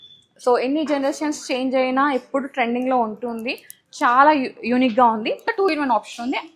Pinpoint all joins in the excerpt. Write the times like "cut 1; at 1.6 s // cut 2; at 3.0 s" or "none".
cut 1; at 5.5 s